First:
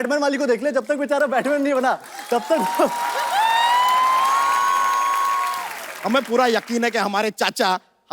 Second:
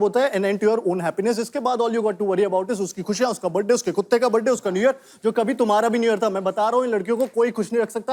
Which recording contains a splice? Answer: first; 1 cut; at 5.7 s

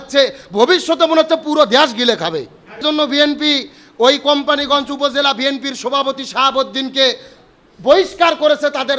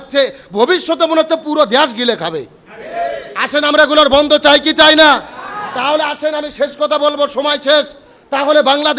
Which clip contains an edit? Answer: first; 1 cut; at 2.8 s

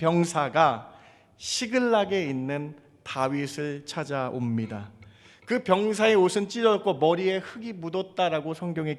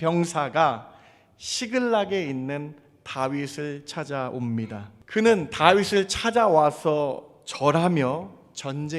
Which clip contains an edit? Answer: second; 1 cut; at 4.9 s

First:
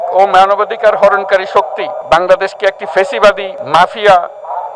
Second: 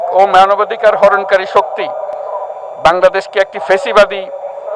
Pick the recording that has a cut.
first; 2 cuts; at 1.9 s, 3.6 s

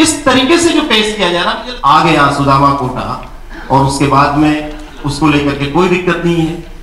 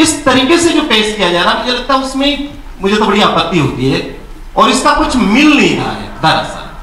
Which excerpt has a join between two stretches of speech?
first; 1 cut; at 1.6 s

